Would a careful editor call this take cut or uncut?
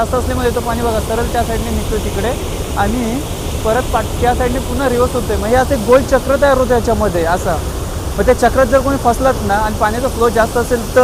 uncut